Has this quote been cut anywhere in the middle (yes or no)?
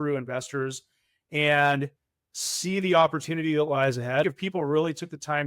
yes